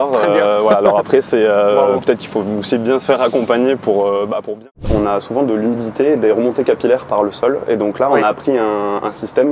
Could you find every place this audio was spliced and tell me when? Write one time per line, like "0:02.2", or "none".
0:04.8